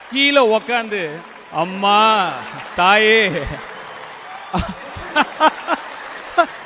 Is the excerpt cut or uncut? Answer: uncut